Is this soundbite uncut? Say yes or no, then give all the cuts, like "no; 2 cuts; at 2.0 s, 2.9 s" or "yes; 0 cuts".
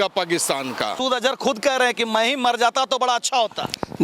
no; 1 cut; at 1.0 s